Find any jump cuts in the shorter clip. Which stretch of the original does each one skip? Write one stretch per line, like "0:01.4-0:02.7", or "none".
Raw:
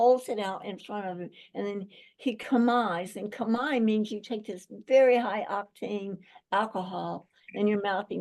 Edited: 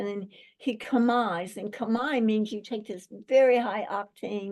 none